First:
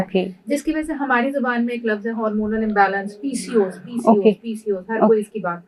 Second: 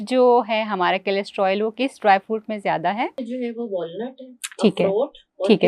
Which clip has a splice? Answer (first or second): second